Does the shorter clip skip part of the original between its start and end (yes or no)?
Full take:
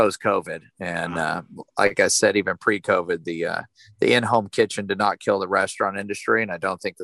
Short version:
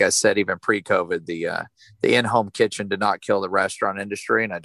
no